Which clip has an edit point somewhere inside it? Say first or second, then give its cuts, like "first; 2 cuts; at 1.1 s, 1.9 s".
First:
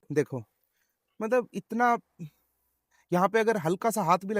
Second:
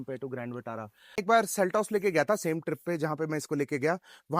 second; 1 cut; at 1.2 s